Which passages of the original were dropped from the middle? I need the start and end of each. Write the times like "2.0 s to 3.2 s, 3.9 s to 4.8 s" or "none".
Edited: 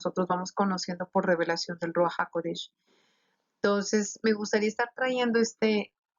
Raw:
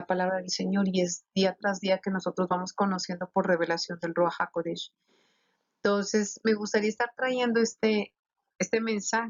none